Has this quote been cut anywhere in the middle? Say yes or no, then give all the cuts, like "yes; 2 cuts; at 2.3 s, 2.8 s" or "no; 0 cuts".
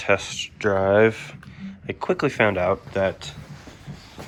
no; 0 cuts